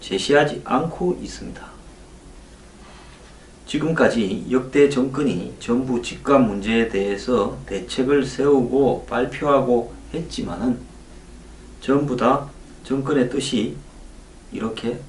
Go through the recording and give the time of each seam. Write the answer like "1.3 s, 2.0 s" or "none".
1.3 s